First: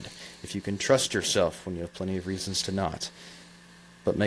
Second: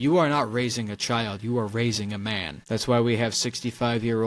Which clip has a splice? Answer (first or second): second